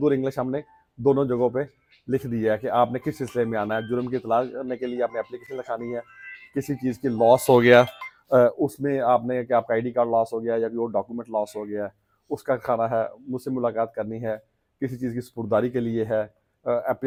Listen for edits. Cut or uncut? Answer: uncut